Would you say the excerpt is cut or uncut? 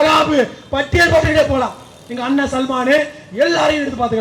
uncut